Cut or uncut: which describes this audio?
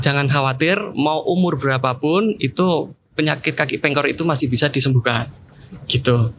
uncut